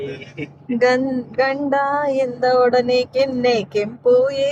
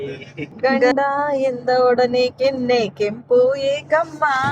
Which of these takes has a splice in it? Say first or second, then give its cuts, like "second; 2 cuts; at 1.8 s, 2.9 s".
second; 1 cut; at 0.9 s